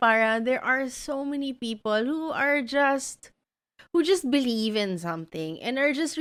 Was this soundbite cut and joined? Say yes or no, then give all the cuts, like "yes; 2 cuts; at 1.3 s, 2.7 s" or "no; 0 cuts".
no; 0 cuts